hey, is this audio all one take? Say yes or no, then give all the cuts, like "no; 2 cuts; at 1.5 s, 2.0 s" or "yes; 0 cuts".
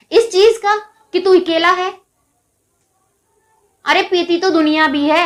yes; 0 cuts